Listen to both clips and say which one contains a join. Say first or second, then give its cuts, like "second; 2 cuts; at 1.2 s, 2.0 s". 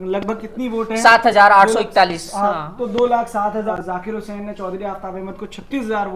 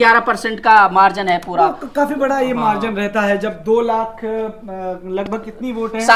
first; 1 cut; at 3.7 s